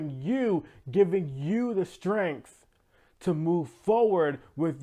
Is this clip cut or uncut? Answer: uncut